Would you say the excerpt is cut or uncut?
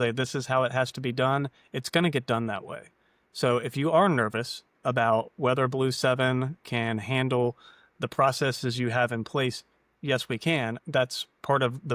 uncut